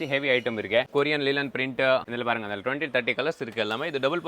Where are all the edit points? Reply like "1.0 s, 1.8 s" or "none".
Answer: 0.9 s, 2.1 s